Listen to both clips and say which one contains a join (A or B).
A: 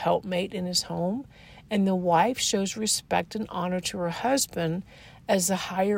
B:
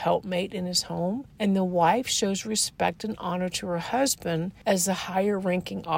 B